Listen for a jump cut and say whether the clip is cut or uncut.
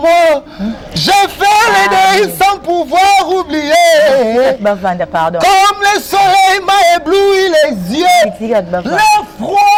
uncut